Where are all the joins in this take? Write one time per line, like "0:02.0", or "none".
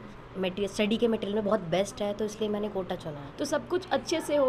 0:03.2